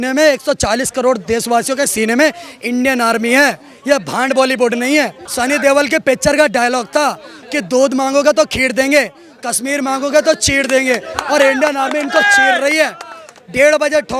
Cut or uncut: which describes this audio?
cut